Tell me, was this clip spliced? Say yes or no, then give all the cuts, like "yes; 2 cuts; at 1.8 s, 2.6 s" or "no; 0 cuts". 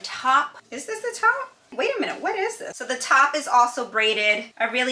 no; 0 cuts